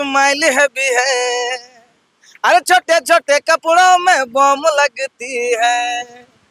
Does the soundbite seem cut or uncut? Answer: uncut